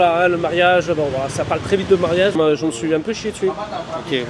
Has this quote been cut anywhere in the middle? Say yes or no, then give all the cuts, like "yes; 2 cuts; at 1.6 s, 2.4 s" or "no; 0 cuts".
yes; 1 cut; at 2.4 s